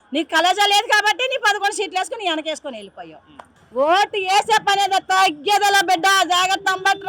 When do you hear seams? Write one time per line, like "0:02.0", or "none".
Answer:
0:03.6

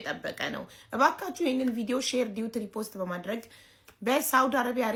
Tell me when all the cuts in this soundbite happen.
none

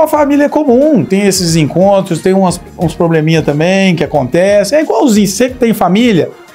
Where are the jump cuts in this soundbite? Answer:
0:01.1

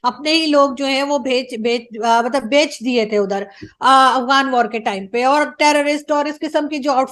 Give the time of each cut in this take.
none

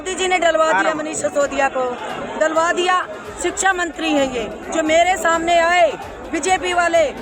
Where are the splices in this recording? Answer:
none

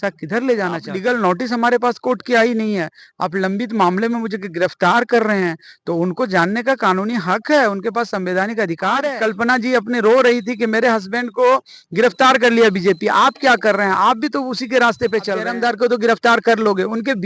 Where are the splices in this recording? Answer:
0:00.9
0:09.1
0:15.5

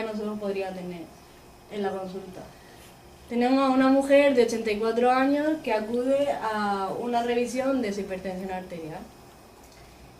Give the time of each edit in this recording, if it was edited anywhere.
0:08.1

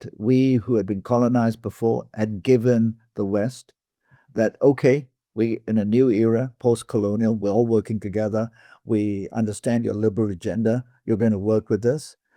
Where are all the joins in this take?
none

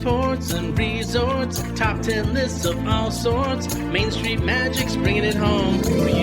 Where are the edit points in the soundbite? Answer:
none

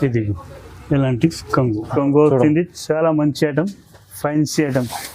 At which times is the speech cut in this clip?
0:01.9

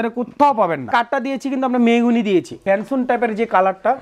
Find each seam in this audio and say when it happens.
0:00.9
0:02.6

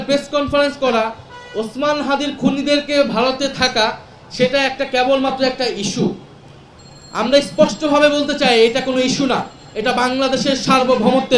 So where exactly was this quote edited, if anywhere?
none

